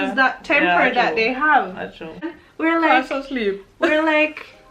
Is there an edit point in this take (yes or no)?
yes